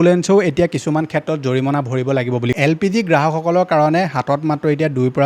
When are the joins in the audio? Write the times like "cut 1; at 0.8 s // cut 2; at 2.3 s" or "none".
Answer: cut 1; at 2.5 s